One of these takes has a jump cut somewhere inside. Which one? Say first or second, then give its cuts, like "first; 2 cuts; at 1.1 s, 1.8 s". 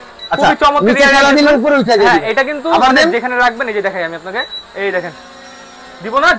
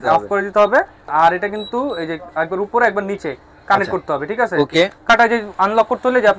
second; 2 cuts; at 1.1 s, 5.1 s